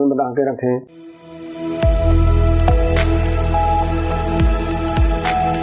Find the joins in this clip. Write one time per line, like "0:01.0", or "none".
0:01.0